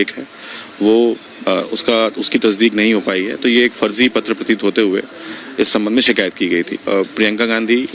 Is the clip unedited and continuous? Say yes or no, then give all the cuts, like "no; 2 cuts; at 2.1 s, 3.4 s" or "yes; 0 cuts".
no; 1 cut; at 6.8 s